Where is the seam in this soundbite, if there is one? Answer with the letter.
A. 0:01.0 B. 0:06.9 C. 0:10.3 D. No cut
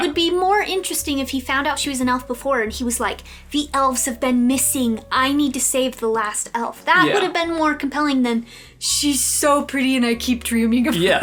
D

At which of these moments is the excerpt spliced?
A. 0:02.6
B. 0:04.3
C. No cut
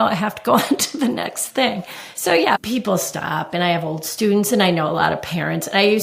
A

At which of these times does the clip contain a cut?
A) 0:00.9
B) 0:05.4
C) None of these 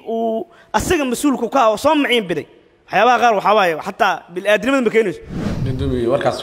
B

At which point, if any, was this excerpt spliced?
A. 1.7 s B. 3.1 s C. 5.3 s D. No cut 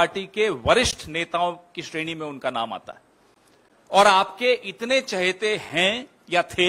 D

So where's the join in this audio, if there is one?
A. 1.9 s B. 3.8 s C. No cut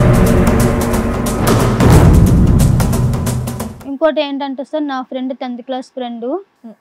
B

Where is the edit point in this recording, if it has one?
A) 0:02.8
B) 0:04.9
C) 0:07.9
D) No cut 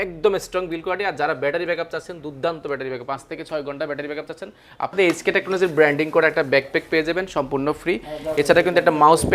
B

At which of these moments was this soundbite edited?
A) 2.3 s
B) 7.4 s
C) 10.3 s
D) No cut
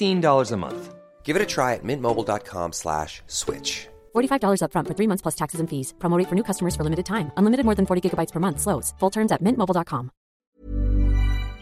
C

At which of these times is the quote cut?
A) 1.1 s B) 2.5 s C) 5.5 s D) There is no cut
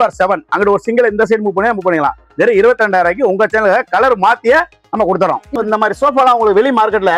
C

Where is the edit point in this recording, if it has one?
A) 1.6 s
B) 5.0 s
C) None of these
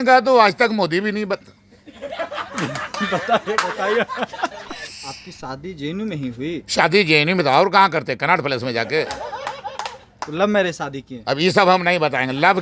B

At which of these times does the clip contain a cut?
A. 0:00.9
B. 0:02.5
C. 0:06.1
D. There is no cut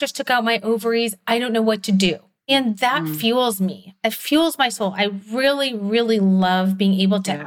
B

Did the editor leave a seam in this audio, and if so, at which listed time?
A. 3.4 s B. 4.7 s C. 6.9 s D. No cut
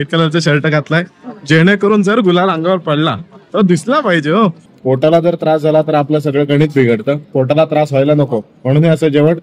B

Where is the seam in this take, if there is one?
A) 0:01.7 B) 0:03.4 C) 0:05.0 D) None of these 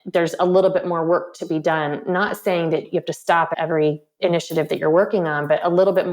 B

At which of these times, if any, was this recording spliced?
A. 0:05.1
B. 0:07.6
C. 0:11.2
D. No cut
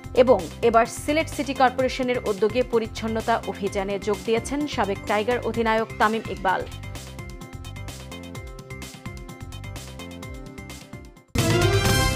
C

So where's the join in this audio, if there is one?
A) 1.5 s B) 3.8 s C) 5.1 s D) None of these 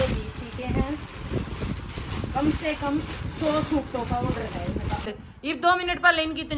C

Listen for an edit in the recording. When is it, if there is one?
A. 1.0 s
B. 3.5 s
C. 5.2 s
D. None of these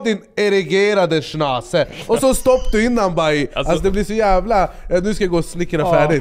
B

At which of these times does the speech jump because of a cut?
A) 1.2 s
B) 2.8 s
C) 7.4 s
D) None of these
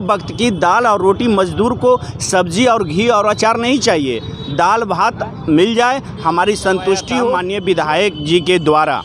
C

